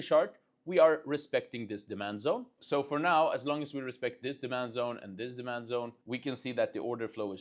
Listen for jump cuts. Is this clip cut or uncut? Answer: cut